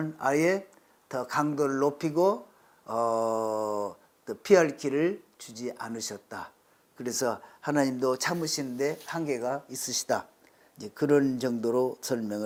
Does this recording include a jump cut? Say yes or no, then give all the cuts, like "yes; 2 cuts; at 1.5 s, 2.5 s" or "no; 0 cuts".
no; 0 cuts